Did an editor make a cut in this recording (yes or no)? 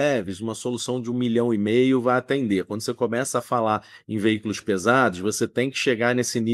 no